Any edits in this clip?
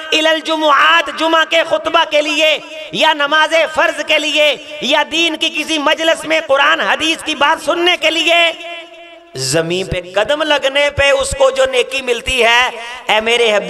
no; 0 cuts

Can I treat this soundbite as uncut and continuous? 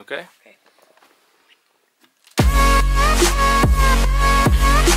yes; 0 cuts

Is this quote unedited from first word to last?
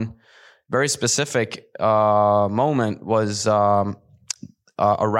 yes; 0 cuts

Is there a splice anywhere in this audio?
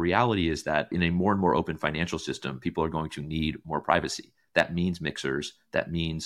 yes; 1 cut; at 0.9 s

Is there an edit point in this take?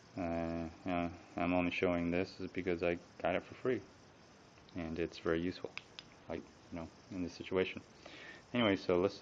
no; 0 cuts

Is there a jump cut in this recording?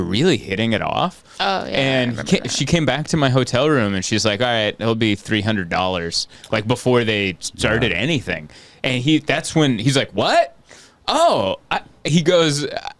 no; 0 cuts

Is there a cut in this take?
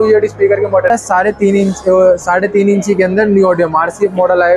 yes; 1 cut; at 0.9 s

